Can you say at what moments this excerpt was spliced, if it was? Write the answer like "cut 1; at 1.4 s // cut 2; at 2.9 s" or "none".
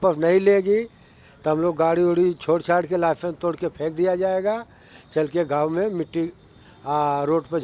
none